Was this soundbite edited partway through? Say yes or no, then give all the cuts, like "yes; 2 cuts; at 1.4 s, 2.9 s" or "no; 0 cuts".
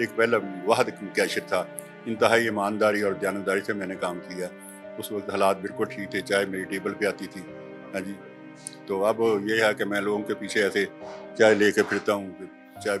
no; 0 cuts